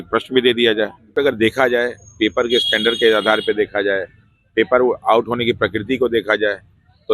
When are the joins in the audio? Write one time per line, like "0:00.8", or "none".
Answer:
0:01.1